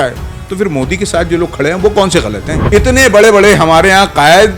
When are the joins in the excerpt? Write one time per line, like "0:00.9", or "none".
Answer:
0:02.5